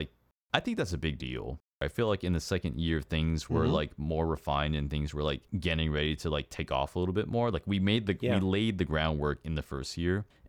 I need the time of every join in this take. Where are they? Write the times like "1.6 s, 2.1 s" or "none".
1.8 s